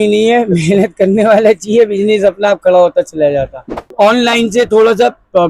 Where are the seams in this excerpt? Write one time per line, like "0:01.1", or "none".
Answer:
0:03.9